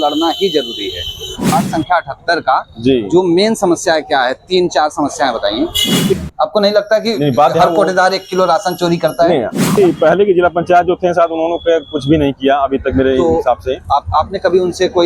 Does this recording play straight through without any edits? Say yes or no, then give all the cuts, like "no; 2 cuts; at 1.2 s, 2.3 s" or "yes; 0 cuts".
no; 3 cuts; at 1.5 s, 6.2 s, 9.8 s